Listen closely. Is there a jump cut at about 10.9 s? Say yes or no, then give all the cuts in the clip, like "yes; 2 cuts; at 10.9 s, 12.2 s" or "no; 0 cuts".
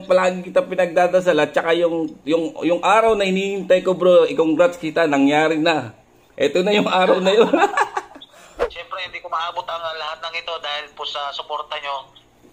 no; 1 cut; at 8.6 s